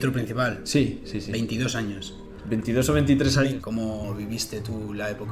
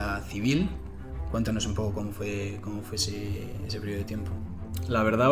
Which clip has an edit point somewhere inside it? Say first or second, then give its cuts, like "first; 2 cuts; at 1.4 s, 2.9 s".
first; 1 cut; at 3.3 s